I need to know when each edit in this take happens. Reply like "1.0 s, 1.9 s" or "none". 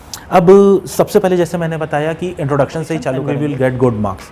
3.1 s